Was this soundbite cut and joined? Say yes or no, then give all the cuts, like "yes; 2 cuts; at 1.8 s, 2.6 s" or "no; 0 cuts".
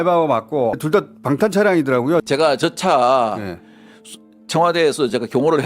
yes; 2 cuts; at 0.8 s, 2.2 s